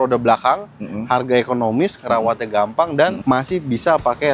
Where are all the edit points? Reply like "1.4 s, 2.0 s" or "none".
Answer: 3.2 s